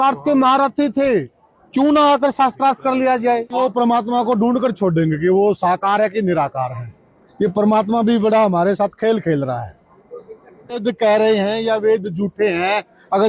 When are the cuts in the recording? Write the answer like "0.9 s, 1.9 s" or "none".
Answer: 3.6 s, 10.8 s

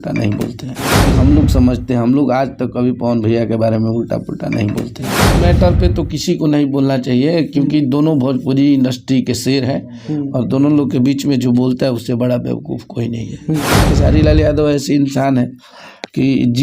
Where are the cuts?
1.0 s, 5.3 s, 13.7 s

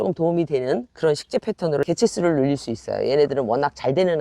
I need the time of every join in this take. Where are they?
1.9 s

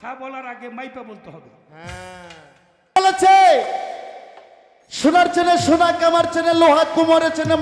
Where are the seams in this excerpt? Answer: 3.0 s

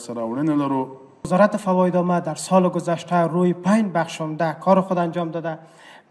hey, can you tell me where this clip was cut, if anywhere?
1.1 s

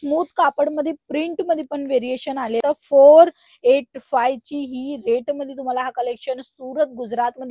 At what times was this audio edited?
2.6 s

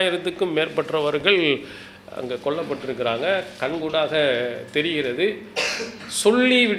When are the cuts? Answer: none

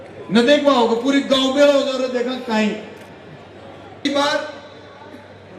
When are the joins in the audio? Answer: 4.0 s

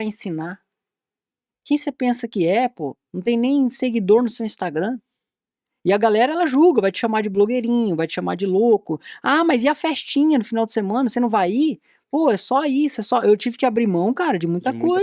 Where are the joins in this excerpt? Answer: none

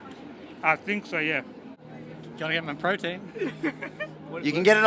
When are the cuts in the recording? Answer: 1.6 s

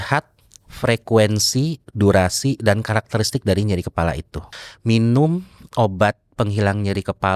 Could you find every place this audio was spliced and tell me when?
4.5 s

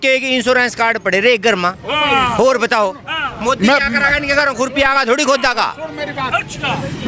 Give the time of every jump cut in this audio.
none

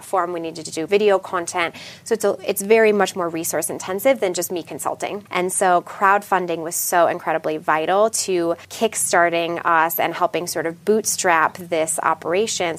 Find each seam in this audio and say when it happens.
0.9 s, 5.2 s, 8.7 s

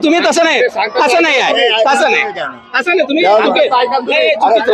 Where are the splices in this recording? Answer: none

